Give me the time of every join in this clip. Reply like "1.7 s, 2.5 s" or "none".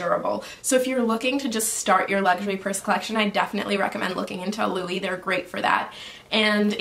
none